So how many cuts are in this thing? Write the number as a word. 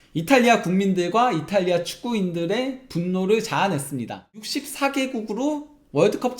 one